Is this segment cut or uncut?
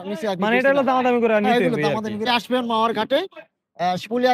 cut